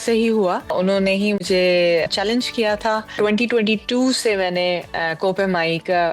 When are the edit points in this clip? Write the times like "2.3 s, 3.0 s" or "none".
1.0 s, 2.1 s, 3.2 s